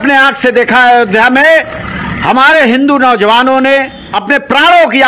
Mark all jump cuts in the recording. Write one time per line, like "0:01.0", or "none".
0:04.0